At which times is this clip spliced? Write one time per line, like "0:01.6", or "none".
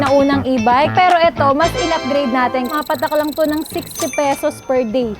0:02.7